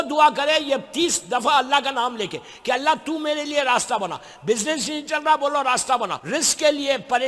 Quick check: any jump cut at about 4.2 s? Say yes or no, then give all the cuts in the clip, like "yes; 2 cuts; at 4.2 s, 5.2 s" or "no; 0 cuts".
no; 1 cut; at 6.2 s